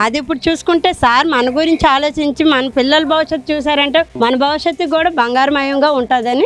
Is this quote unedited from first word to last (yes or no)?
no